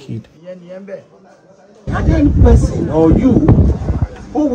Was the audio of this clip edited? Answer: yes; 1 cut; at 1.8 s

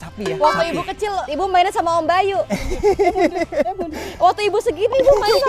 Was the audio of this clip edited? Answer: no; 0 cuts

